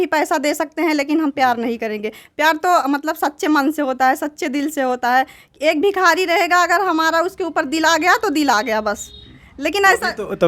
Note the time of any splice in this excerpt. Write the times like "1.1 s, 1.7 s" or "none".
none